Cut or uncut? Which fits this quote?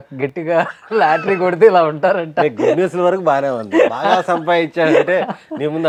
uncut